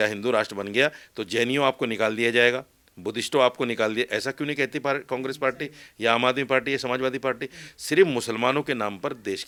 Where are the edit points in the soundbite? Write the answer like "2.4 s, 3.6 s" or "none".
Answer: none